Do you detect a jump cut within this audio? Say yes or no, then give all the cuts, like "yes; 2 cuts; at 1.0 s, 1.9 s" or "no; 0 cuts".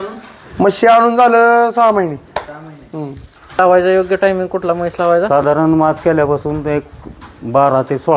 yes; 1 cut; at 3.6 s